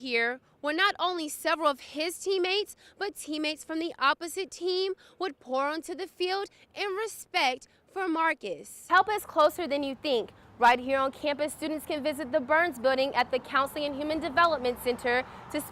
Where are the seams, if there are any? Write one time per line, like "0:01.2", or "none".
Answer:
0:08.9

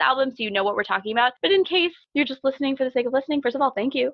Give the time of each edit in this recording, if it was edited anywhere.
0:01.7

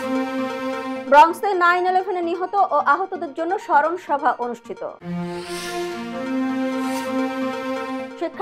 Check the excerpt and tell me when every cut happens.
0:00.9

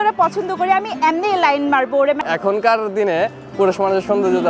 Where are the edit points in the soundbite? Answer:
0:02.2

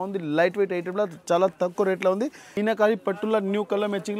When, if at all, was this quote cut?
0:02.5

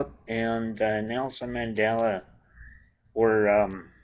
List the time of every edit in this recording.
0:01.5

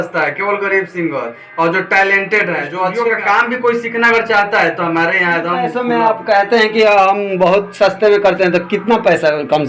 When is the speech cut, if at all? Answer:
0:02.9
0:05.6

